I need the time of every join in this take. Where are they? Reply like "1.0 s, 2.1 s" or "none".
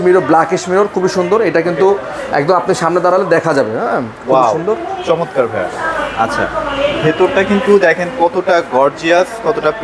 none

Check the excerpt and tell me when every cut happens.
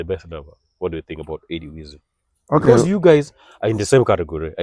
none

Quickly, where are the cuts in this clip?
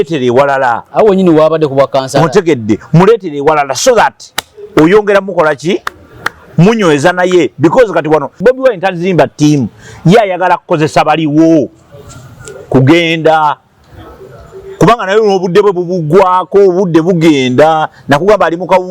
8.4 s

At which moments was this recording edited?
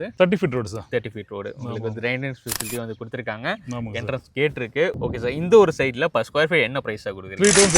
5.0 s

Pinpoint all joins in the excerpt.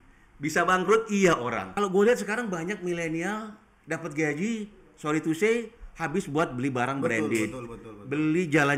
1.6 s

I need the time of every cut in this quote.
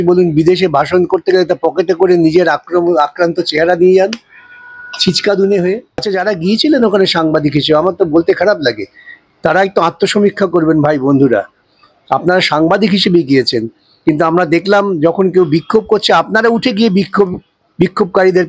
6.1 s

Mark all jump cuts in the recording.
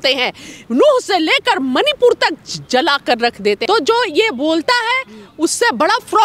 3.6 s

